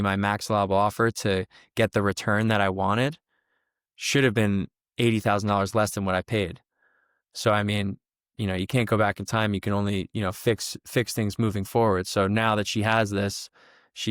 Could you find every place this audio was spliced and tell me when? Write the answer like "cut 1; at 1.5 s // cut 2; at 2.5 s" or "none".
none